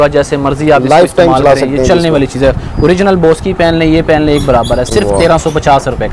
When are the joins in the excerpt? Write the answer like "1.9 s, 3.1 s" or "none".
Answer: none